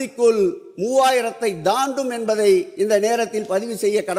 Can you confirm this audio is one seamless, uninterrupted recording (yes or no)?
yes